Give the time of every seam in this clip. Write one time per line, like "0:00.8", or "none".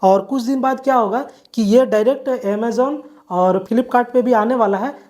0:03.6